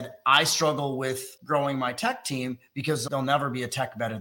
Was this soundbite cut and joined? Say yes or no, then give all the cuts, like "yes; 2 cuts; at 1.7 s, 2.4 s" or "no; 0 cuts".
yes; 2 cuts; at 1.3 s, 3.0 s